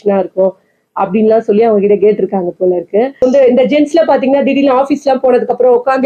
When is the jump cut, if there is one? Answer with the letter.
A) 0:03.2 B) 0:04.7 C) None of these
A